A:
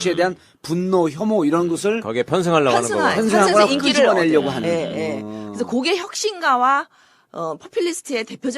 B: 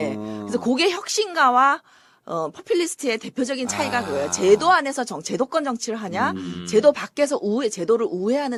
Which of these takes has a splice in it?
A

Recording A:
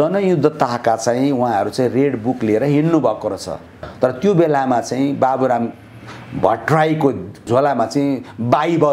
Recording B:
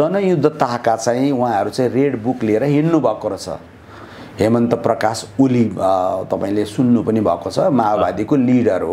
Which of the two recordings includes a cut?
A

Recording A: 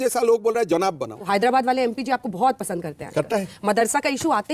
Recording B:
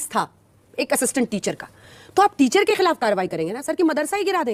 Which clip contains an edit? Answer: A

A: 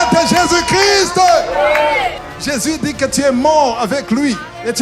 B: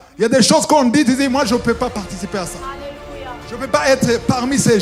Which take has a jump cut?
A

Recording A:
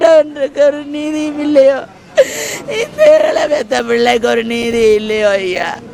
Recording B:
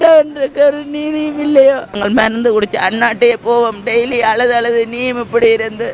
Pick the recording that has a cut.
B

